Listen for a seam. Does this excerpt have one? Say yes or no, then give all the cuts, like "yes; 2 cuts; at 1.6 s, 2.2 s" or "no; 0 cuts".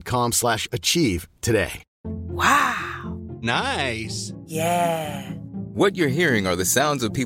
yes; 1 cut; at 1.9 s